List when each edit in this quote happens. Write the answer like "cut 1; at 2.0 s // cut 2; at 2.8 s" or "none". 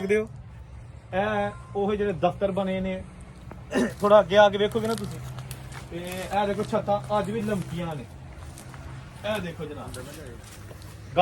none